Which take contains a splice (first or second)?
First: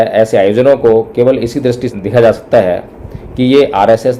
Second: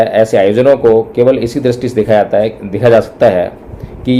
first